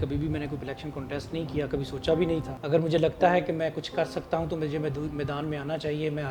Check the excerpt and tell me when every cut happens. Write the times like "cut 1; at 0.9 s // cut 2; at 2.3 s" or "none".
cut 1; at 2.6 s